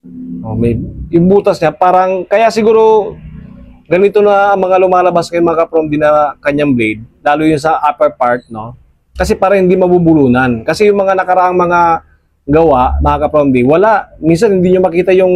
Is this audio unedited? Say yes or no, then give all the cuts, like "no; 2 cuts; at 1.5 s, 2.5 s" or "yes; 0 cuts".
yes; 0 cuts